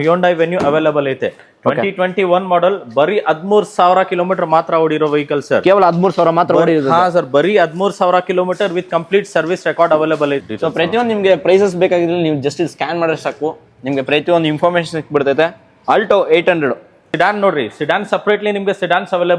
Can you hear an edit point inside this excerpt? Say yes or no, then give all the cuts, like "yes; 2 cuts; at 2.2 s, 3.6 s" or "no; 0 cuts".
yes; 2 cuts; at 10.5 s, 17.1 s